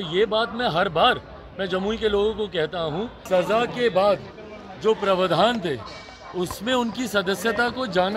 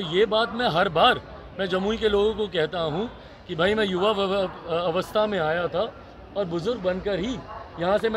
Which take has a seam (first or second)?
first